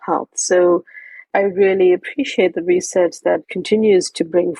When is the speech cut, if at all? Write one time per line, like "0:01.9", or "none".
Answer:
0:01.2
0:03.5